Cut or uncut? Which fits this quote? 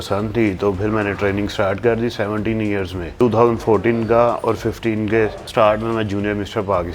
cut